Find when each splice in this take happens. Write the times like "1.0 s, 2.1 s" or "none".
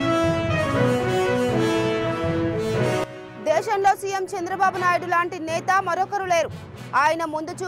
3.1 s